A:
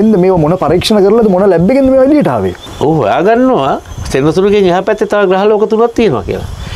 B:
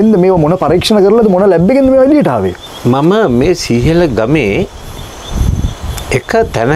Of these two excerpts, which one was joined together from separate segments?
A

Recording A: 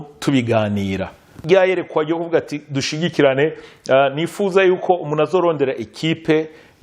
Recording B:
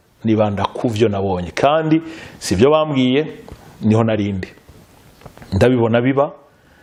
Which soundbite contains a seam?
A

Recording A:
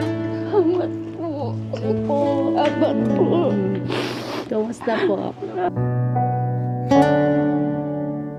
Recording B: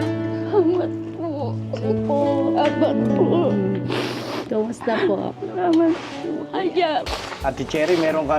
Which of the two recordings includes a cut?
B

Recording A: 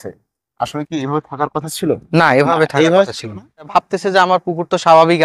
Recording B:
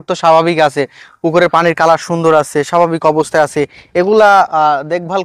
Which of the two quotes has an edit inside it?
A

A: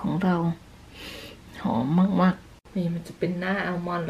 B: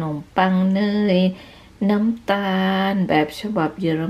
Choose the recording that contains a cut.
A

